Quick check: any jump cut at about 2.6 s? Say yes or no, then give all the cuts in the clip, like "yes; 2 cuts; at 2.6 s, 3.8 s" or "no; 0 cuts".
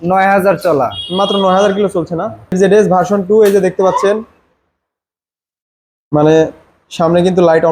yes; 1 cut; at 2.6 s